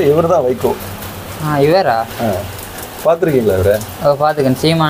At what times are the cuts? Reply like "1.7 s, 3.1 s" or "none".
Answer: none